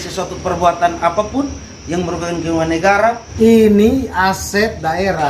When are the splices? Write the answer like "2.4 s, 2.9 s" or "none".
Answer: 3.3 s